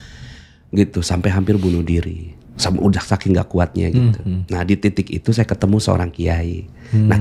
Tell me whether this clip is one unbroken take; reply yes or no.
yes